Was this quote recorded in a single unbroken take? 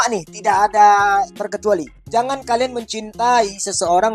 yes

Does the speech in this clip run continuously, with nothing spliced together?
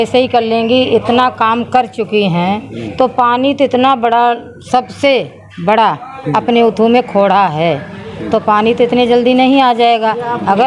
yes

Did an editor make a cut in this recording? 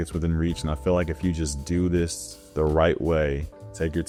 no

